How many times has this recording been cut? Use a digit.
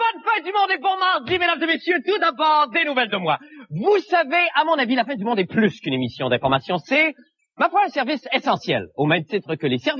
1